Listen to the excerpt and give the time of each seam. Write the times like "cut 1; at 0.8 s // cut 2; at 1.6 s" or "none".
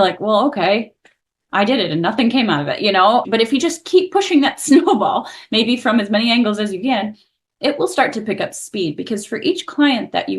cut 1; at 3.2 s